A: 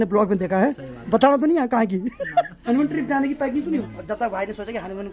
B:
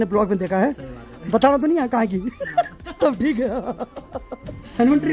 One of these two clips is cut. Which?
A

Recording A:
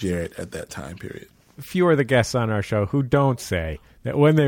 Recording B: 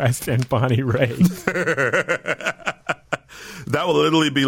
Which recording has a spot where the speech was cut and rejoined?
A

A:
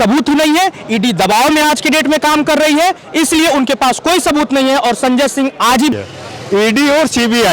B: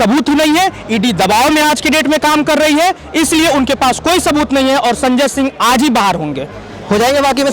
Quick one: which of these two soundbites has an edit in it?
A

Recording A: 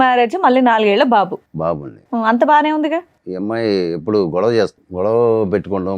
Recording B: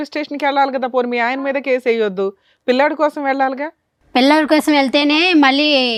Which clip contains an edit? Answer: A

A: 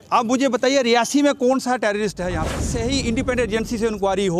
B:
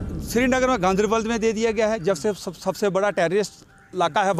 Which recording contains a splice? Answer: A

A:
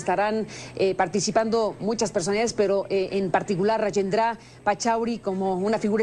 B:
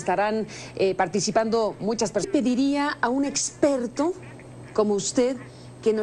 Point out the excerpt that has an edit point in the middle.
A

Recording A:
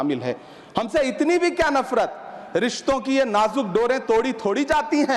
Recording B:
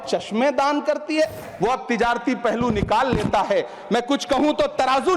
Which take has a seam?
B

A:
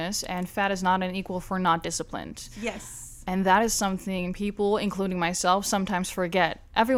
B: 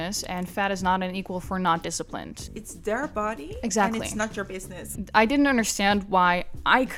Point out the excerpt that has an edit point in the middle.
B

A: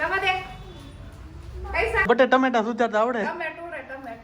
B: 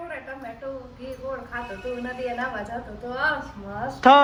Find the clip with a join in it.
A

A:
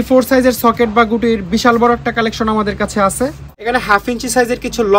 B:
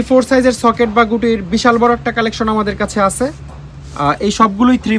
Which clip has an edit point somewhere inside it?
A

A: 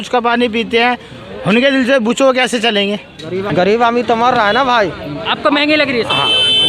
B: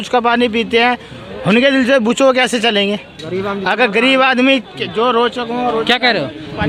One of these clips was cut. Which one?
A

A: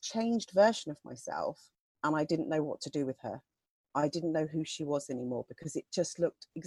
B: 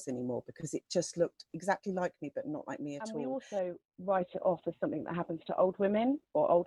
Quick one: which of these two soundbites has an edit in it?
B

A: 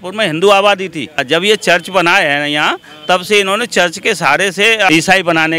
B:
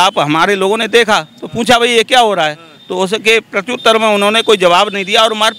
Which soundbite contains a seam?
A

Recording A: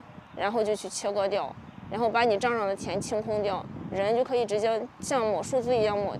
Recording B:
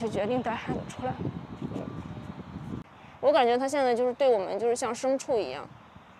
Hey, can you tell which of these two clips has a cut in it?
B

